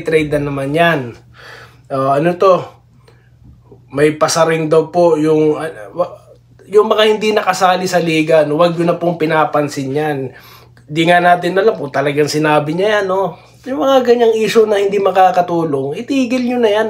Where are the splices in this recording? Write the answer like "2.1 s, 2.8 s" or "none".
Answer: none